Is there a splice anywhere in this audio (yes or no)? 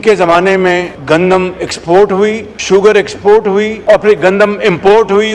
yes